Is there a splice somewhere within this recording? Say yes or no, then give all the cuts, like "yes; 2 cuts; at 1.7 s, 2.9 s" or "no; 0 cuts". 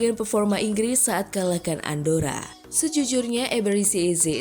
yes; 1 cut; at 2.5 s